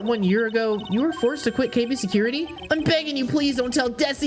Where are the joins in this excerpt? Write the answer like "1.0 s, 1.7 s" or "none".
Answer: 2.5 s